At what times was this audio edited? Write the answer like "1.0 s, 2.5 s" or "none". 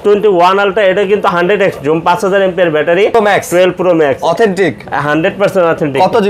3.1 s